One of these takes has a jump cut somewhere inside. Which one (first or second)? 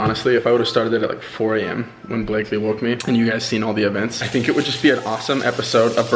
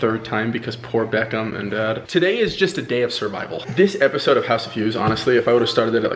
second